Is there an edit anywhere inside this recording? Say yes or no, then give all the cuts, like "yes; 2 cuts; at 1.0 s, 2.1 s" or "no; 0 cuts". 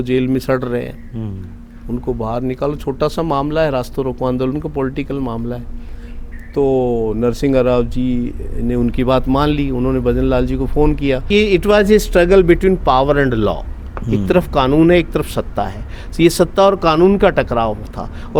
yes; 1 cut; at 11.3 s